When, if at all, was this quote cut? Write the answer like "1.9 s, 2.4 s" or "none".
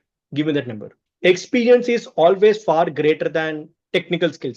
1.0 s